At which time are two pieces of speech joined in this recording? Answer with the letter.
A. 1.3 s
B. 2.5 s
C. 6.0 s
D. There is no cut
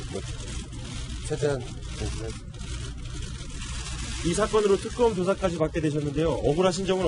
B